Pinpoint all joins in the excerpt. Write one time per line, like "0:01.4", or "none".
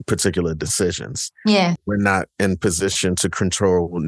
0:01.8